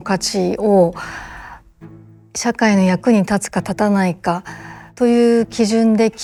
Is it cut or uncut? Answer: uncut